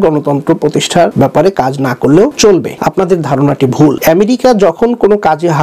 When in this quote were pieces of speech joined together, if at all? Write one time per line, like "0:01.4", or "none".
0:01.1
0:02.6
0:04.0